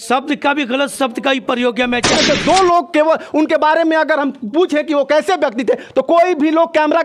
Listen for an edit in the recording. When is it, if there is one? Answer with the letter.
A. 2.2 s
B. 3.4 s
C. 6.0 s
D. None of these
A